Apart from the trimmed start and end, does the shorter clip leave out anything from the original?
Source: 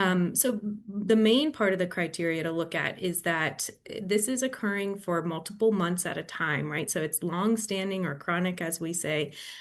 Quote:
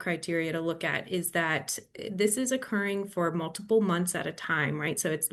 no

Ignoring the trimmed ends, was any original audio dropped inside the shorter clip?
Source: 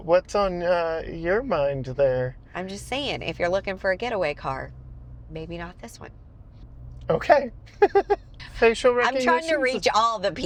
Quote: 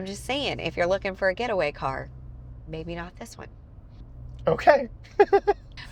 no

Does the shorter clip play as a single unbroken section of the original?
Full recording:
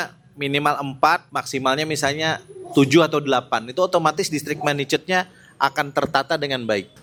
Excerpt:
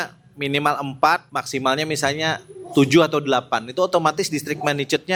yes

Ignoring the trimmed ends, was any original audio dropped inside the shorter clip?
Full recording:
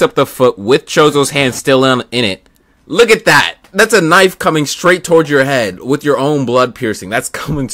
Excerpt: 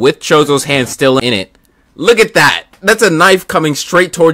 yes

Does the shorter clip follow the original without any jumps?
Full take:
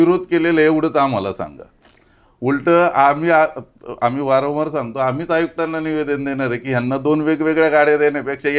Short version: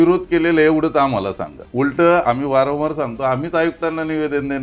no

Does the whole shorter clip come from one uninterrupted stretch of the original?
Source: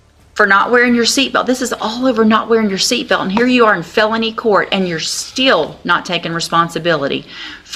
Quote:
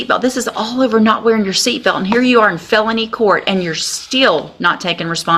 yes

